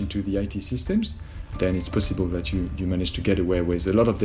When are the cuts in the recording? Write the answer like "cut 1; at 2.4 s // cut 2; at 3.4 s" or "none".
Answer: none